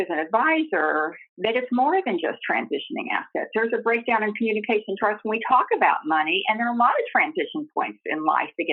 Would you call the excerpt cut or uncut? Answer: cut